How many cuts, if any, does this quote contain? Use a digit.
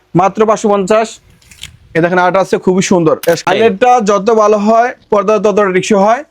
1